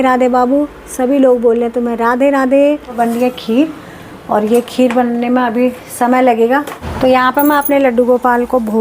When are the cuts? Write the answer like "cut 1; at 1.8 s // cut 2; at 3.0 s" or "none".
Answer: cut 1; at 2.9 s // cut 2; at 6.8 s

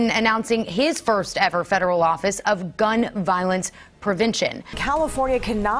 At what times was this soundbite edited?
cut 1; at 4.7 s

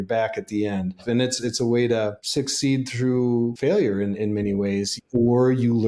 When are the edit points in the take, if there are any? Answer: cut 1; at 1.0 s // cut 2; at 2.2 s // cut 3; at 3.6 s // cut 4; at 5.0 s

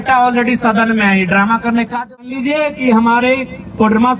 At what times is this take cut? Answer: cut 1; at 2.3 s

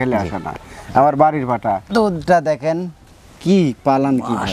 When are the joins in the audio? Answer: cut 1; at 1.9 s

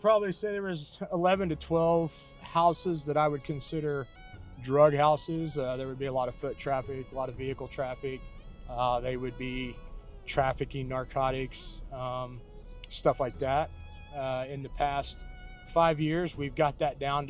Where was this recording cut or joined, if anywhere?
none

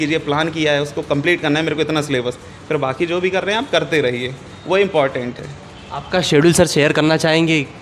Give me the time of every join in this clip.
none

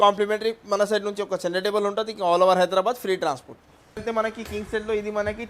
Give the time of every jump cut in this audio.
cut 1; at 3.8 s

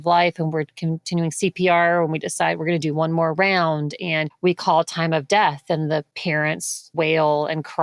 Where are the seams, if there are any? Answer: cut 1; at 4.3 s // cut 2; at 6.5 s

